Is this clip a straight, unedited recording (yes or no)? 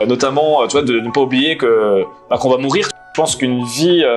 no